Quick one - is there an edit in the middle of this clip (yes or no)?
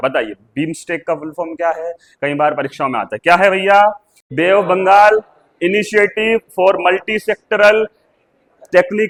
no